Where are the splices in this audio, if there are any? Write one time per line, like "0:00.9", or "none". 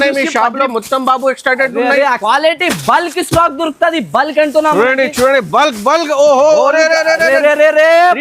0:02.2

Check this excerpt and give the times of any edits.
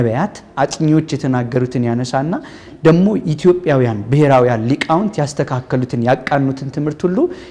none

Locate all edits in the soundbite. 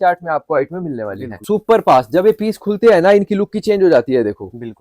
0:01.3

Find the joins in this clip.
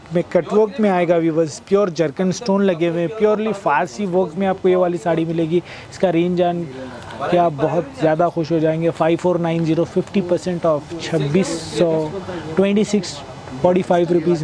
none

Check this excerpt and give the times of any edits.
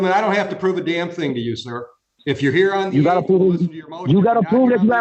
none

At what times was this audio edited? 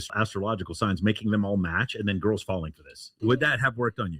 0:03.1

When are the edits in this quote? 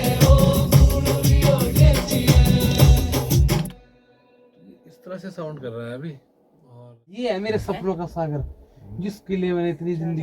0:07.2

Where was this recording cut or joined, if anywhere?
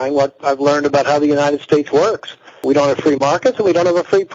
0:02.6

